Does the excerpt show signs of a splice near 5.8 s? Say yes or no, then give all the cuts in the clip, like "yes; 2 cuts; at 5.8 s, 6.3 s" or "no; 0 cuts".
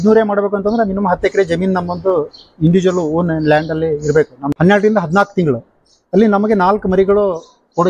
no; 1 cut; at 4.4 s